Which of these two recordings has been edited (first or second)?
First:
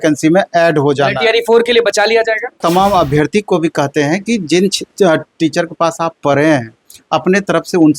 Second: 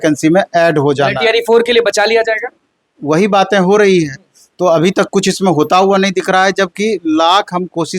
first